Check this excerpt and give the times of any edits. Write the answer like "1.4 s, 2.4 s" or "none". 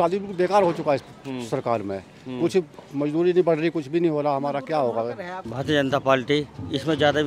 5.4 s